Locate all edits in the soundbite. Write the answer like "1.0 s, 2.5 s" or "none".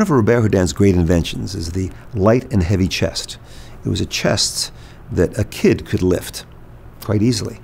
none